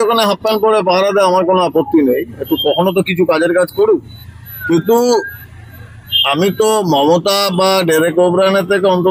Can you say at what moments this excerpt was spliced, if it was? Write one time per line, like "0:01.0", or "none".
none